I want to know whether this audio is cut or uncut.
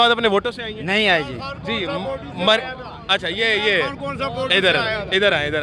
uncut